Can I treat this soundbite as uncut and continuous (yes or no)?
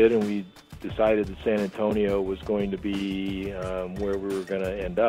yes